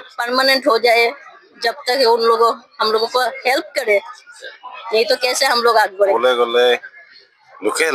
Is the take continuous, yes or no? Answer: yes